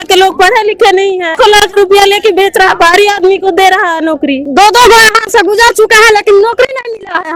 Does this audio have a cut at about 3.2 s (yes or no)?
no